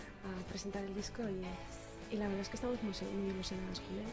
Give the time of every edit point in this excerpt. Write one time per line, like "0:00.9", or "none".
0:03.0